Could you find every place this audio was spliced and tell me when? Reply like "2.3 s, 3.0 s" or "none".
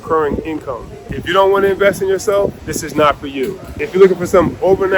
1.2 s, 2.7 s, 3.7 s

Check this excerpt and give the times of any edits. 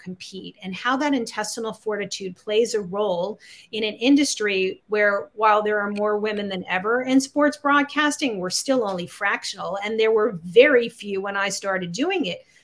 none

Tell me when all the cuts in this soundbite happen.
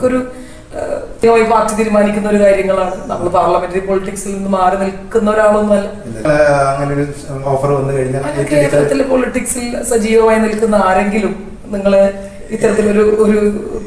1.2 s

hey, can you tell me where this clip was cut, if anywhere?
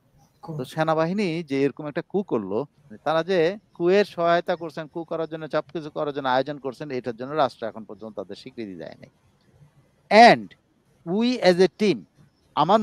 2.8 s

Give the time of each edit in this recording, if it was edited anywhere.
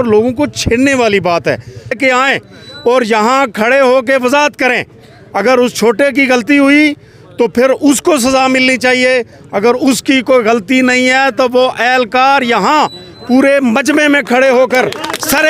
2.0 s

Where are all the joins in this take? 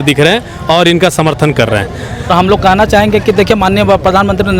2.3 s

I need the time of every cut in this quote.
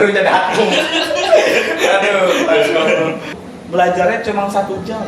3.3 s

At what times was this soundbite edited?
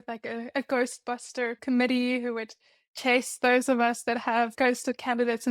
1.6 s, 4.5 s

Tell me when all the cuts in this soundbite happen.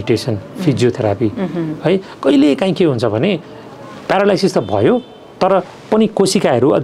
none

